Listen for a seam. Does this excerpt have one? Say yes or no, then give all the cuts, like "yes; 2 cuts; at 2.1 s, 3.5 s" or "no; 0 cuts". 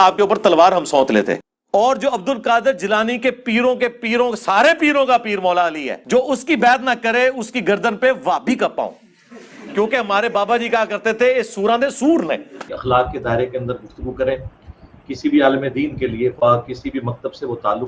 yes; 2 cuts; at 1.4 s, 12.6 s